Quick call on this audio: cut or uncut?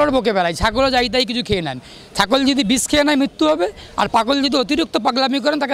uncut